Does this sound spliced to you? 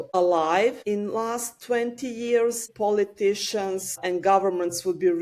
yes; 1 cut; at 2.7 s

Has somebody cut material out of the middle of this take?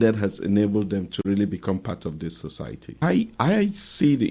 yes; 1 cut; at 3.0 s

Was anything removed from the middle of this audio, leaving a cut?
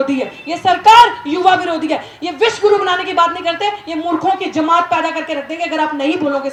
no; 0 cuts

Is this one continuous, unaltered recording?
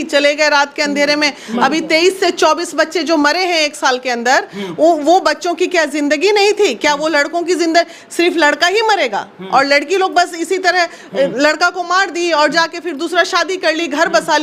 yes; 0 cuts

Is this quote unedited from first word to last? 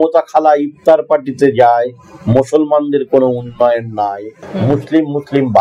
no; 1 cut; at 4.3 s

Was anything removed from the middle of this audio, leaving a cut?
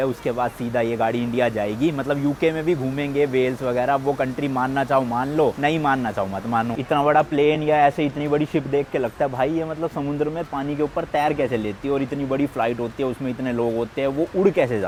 no; 0 cuts

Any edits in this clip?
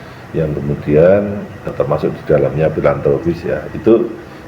yes; 1 cut; at 1.7 s

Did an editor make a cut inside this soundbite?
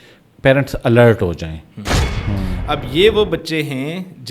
yes; 1 cut; at 2.1 s

